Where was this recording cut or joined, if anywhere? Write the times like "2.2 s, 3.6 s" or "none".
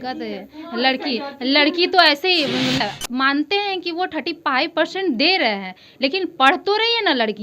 2.8 s